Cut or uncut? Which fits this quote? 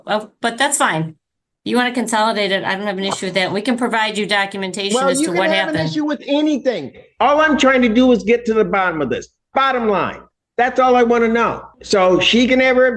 cut